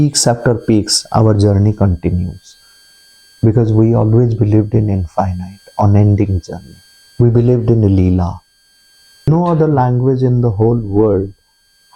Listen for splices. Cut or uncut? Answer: cut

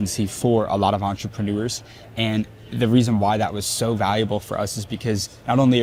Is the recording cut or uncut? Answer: uncut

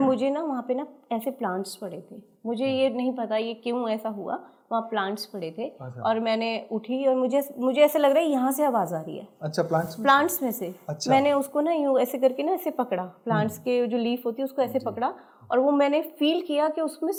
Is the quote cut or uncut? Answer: uncut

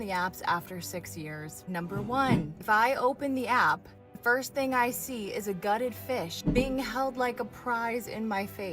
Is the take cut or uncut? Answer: cut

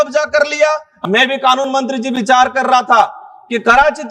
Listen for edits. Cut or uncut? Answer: uncut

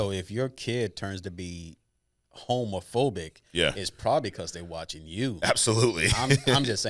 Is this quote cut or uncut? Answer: uncut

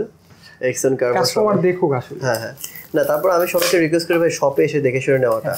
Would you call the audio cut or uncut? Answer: uncut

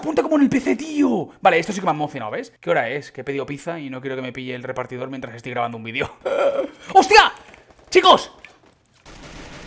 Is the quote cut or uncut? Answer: cut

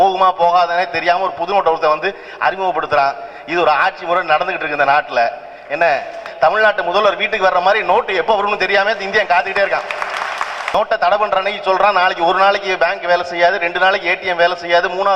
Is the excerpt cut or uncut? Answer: cut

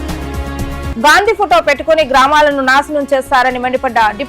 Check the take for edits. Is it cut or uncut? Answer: cut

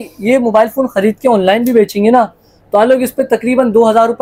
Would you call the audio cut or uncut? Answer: uncut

